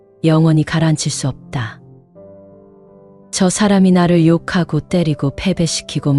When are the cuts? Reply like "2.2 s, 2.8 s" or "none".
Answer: 1.8 s, 3.3 s